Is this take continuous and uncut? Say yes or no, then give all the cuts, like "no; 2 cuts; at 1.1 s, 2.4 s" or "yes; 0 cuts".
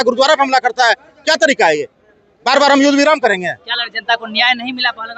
yes; 0 cuts